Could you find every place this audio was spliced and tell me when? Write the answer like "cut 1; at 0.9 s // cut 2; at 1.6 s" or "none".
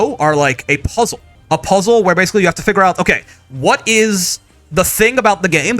cut 1; at 1.3 s